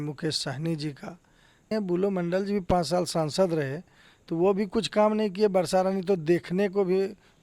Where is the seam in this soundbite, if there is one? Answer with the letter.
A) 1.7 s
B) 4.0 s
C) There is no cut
A